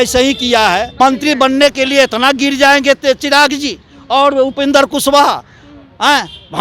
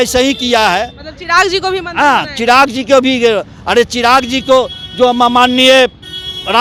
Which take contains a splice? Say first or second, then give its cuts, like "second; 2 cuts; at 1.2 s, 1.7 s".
first; 1 cut; at 0.9 s